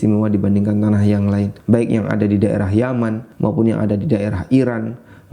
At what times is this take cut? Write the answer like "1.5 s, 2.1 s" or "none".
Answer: 1.5 s, 3.3 s

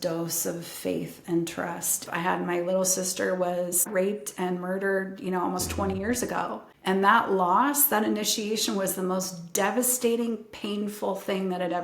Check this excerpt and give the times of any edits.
2.0 s, 3.9 s, 6.6 s

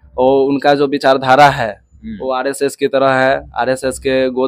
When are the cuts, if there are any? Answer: none

